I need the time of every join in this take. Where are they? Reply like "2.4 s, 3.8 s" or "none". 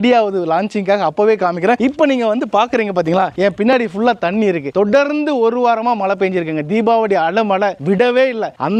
none